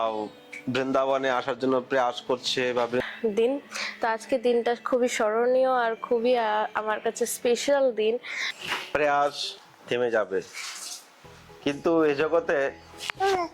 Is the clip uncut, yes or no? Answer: no